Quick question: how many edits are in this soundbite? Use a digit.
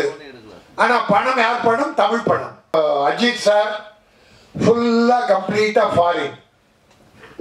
1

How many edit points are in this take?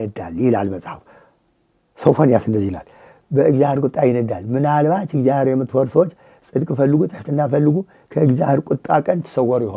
0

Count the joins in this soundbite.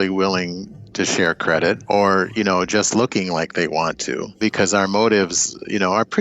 2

